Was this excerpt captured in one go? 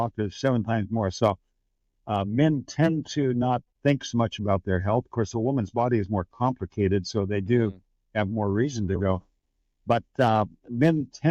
yes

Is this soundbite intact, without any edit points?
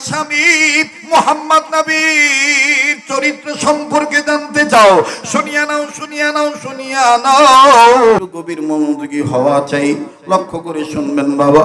no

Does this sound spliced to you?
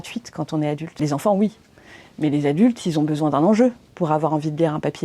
yes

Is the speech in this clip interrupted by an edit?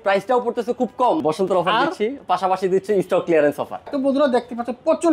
yes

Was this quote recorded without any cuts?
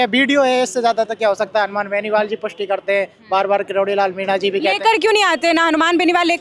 yes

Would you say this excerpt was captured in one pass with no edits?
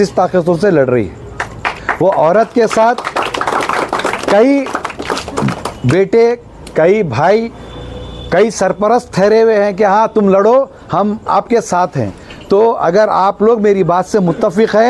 yes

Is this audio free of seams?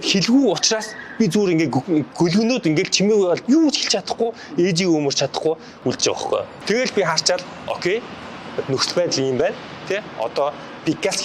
no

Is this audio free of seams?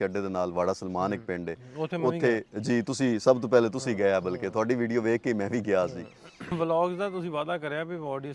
no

